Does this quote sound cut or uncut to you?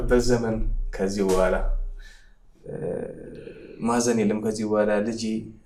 uncut